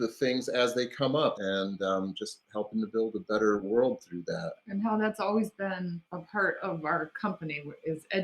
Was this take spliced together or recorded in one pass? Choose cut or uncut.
cut